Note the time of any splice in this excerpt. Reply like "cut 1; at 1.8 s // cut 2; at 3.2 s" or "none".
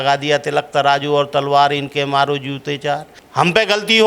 cut 1; at 3.2 s